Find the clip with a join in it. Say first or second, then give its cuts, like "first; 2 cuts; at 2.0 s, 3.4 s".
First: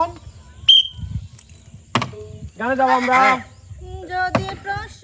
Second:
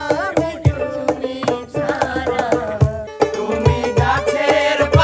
second; 1 cut; at 3.1 s